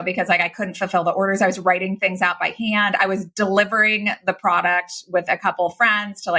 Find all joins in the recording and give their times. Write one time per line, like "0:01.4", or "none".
none